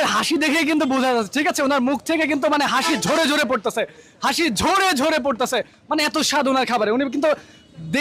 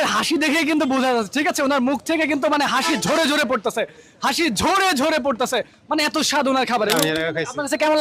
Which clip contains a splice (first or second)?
second